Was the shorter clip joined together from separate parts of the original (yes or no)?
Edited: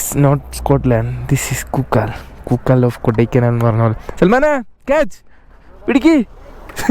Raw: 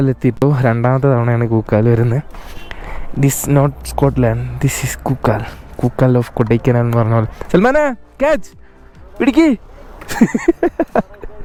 no